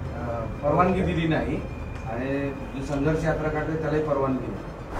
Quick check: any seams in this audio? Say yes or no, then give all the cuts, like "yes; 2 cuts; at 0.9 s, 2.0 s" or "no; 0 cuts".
no; 0 cuts